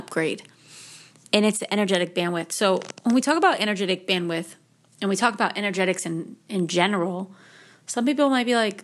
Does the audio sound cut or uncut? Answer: uncut